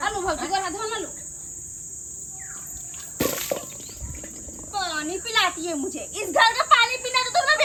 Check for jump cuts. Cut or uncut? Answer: uncut